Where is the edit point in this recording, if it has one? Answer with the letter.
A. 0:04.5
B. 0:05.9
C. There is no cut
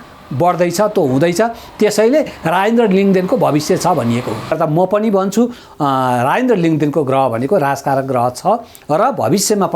A